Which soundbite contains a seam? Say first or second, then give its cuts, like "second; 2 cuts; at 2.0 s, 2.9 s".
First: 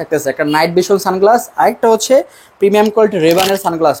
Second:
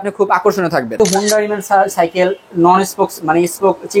second; 1 cut; at 0.9 s